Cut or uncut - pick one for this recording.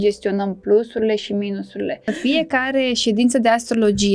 cut